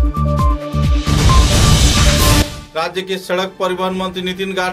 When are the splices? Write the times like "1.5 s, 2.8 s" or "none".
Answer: 2.6 s